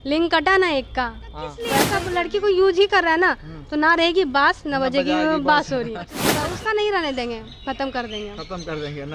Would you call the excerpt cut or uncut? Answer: cut